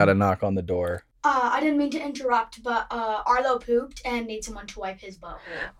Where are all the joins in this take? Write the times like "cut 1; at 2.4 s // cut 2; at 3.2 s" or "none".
cut 1; at 1.0 s